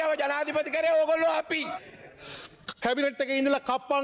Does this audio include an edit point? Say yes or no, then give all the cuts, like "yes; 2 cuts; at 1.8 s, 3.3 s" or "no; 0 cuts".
yes; 1 cut; at 1.8 s